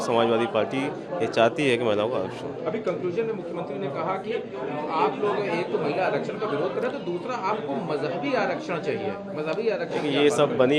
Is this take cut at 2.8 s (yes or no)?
no